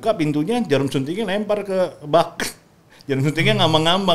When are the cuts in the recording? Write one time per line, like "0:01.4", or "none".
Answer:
none